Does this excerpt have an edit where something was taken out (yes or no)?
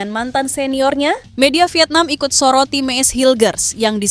yes